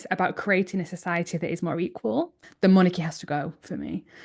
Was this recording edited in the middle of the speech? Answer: yes; 1 cut; at 2.5 s

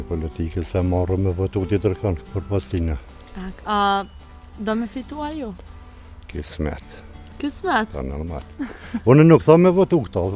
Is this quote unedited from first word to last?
yes; 0 cuts

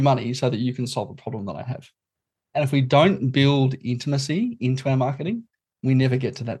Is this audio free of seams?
no; 1 cut; at 2.2 s

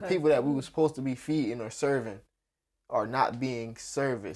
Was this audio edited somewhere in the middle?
no; 0 cuts

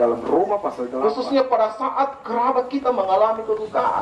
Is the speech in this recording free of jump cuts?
no; 1 cut; at 0.9 s

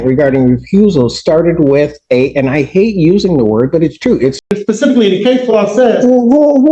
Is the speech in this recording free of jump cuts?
no; 1 cut; at 4.4 s

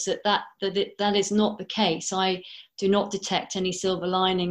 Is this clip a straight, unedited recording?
yes; 0 cuts

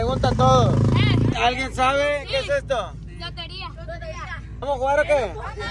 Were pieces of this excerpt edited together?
yes; 2 cuts; at 1.3 s, 4.7 s

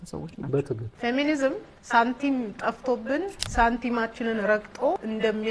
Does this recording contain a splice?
yes; 3 cuts; at 0.9 s, 1.7 s, 3.4 s

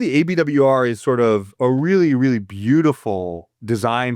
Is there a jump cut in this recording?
yes; 1 cut; at 1.5 s

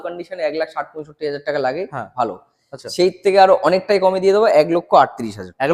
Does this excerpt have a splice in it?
no; 0 cuts

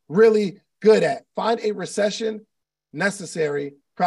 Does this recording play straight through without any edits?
no; 1 cut; at 1.3 s

